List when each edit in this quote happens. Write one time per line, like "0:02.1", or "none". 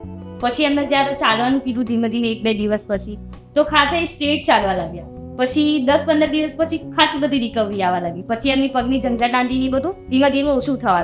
none